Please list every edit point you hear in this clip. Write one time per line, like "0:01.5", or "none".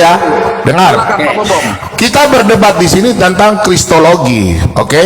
none